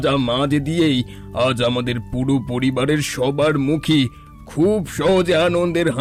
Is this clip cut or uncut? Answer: uncut